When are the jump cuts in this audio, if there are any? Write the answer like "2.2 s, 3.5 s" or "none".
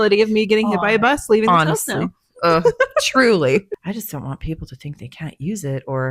3.8 s